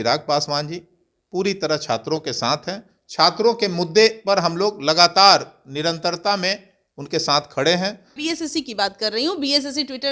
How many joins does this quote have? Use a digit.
1